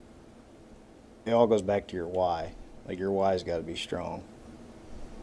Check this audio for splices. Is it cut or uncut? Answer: cut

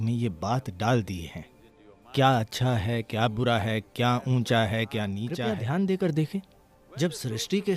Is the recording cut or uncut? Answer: cut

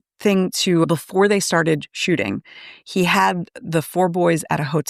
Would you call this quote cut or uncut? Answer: uncut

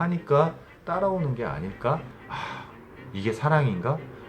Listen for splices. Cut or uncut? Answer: cut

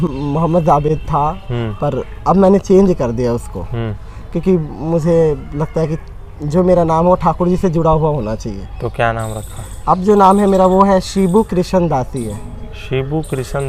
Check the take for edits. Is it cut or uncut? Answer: uncut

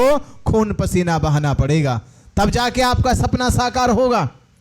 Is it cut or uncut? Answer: uncut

